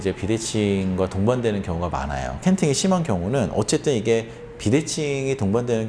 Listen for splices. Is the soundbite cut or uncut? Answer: cut